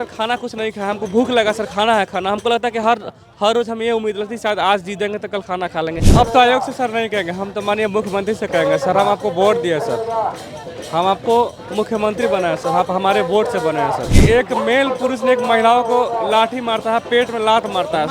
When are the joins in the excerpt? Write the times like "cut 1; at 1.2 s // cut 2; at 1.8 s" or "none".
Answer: cut 1; at 6.0 s // cut 2; at 14.1 s